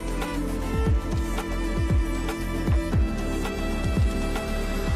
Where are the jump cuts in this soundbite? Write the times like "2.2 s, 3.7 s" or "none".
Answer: 1.0 s